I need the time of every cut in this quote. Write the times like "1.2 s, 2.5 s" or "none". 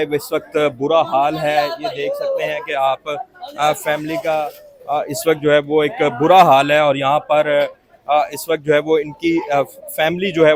none